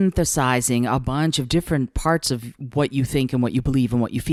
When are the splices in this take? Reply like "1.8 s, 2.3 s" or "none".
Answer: none